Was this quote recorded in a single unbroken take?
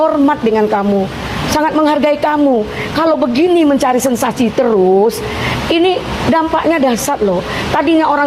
yes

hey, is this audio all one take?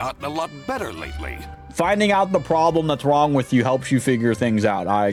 yes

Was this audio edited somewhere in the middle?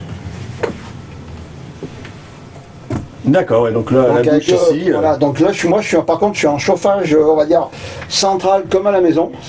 no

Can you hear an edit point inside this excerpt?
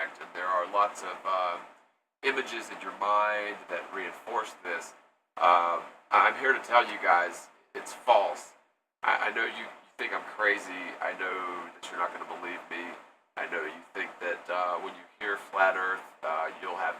yes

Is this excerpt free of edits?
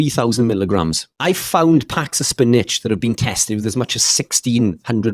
no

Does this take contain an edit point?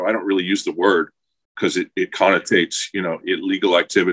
no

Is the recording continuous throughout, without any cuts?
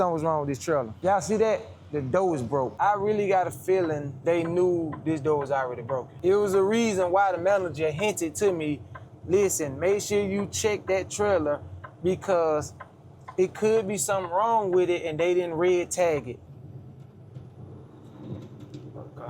no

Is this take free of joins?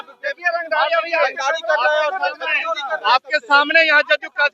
yes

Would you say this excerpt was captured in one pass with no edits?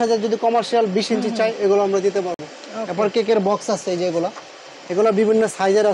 yes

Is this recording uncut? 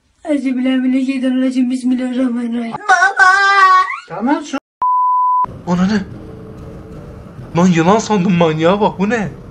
no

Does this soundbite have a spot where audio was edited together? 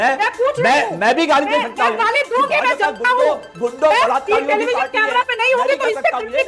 no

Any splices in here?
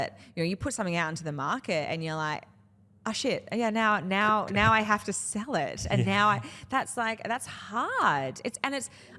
no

